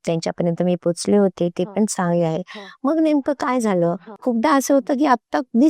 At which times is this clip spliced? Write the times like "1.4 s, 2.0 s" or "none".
4.1 s